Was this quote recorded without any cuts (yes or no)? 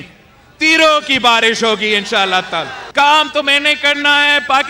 no